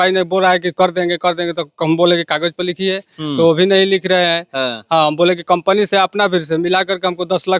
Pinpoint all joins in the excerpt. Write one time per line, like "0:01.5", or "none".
none